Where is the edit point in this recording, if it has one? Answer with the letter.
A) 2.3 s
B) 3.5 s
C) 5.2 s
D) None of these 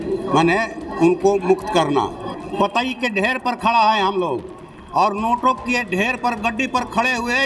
A